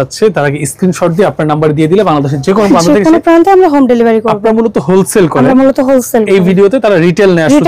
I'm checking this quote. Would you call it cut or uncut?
uncut